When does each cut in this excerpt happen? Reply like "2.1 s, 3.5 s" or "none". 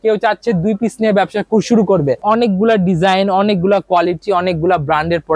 2.2 s